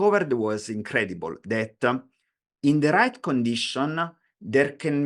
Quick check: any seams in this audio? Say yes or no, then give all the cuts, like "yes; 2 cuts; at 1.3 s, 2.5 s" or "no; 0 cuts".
no; 0 cuts